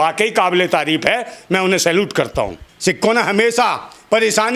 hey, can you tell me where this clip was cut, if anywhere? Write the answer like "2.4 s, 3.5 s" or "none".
2.6 s